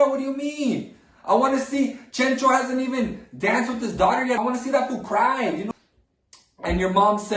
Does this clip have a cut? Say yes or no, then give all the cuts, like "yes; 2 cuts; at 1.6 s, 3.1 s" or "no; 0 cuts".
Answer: yes; 2 cuts; at 4.4 s, 5.7 s